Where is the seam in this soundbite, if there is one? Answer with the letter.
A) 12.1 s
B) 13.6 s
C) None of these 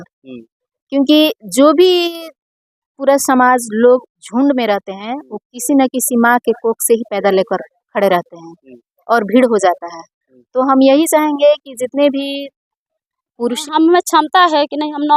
B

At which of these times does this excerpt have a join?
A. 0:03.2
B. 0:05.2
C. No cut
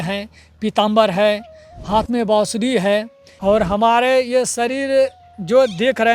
A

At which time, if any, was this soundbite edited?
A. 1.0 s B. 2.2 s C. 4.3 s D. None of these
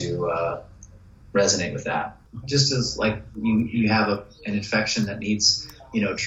B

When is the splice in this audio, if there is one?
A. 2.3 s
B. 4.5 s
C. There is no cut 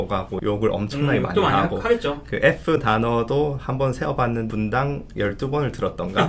B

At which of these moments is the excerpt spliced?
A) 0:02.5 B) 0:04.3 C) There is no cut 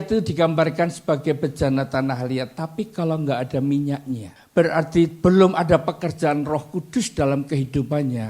B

